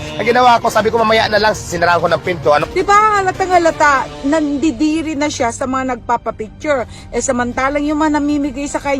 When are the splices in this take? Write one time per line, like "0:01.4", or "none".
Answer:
0:02.6